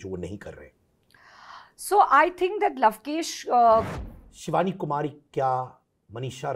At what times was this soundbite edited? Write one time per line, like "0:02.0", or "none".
0:03.9